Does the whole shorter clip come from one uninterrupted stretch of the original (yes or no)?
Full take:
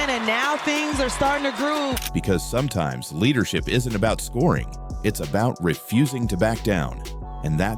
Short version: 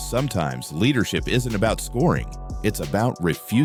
yes